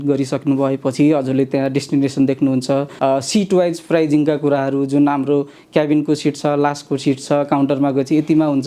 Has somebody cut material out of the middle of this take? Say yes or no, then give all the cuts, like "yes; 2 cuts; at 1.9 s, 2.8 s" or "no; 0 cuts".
yes; 1 cut; at 2.9 s